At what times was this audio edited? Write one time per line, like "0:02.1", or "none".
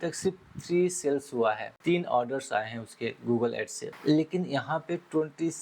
0:01.7
0:03.8